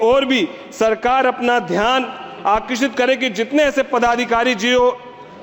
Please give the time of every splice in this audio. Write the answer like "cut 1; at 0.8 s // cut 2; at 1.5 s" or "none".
none